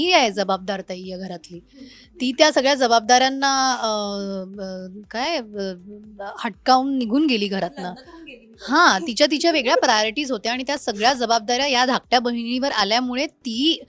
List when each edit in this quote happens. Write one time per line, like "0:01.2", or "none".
none